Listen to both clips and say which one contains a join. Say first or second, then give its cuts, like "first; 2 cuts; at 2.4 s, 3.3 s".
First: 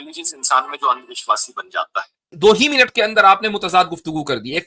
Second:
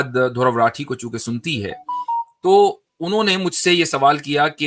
first; 1 cut; at 2.3 s